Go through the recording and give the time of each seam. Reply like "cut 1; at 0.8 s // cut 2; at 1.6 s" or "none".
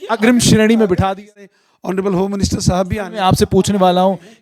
cut 1; at 1.5 s